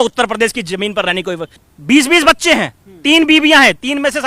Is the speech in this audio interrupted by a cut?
yes; 1 cut; at 1.6 s

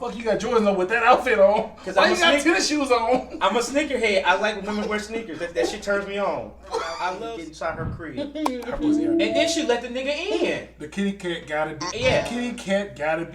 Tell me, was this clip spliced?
yes; 1 cut; at 7.2 s

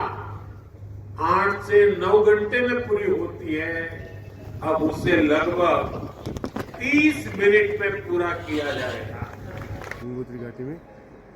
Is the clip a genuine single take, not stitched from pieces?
no; 1 cut; at 10.0 s

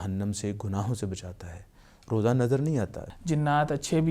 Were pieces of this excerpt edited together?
yes; 1 cut; at 3.0 s

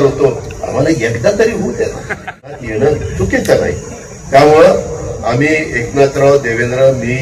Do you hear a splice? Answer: yes; 1 cut; at 2.5 s

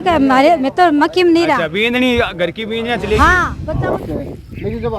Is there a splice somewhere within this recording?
yes; 1 cut; at 3.6 s

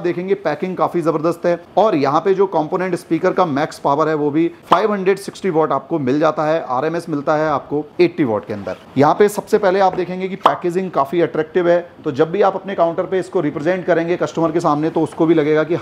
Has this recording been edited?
no; 0 cuts

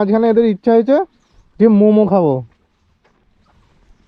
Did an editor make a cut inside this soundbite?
no; 0 cuts

